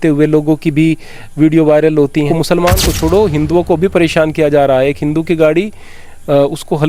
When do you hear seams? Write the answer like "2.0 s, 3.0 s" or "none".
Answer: 2.3 s